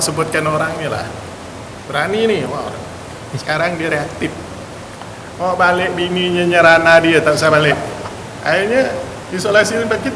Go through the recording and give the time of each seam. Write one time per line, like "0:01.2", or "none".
none

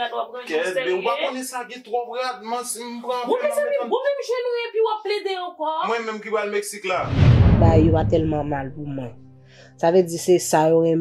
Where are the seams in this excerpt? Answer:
0:07.4

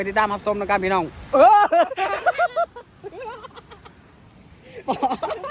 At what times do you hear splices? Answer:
none

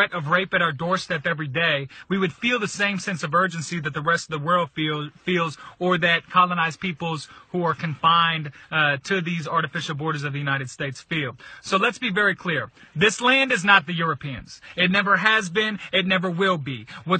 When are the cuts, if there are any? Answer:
0:11.5

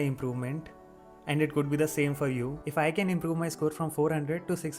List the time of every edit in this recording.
0:02.6

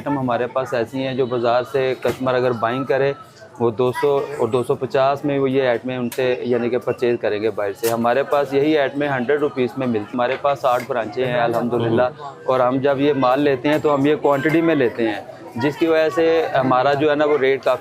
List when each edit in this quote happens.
0:10.1

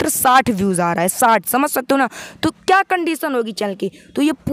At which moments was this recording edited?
none

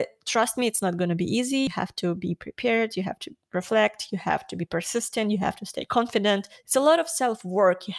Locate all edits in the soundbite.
0:01.7

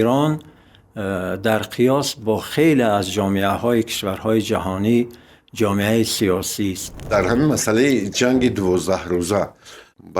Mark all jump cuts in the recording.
0:07.1

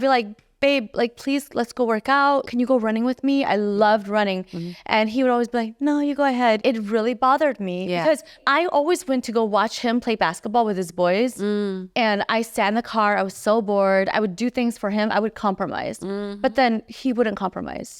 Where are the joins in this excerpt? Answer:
0:02.5
0:06.6
0:08.4

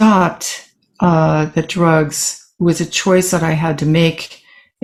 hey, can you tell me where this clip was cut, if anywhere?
none

